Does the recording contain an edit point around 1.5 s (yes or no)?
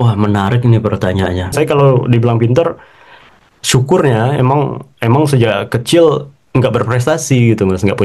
yes